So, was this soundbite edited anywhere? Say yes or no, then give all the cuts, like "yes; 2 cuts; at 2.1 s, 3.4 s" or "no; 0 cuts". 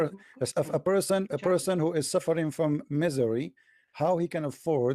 yes; 1 cut; at 1.3 s